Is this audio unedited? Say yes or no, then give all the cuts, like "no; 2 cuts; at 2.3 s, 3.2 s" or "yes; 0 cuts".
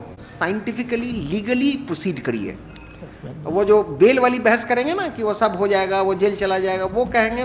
yes; 0 cuts